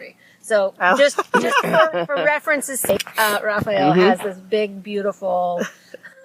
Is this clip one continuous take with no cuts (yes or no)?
no